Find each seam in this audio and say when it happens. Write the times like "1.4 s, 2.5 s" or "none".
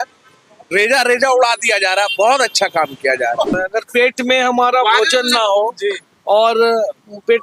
3.5 s